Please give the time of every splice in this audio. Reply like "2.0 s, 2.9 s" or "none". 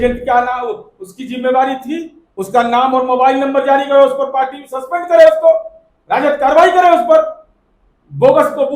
2.2 s